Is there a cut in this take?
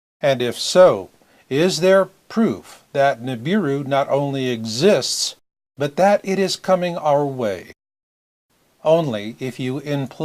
no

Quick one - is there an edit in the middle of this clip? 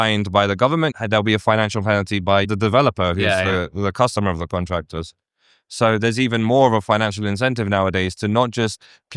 yes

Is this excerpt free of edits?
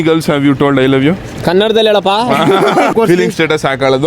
no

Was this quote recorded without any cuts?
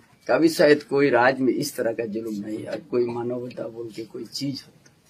yes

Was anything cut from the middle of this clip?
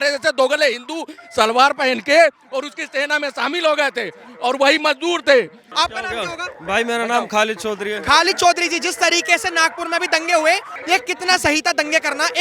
yes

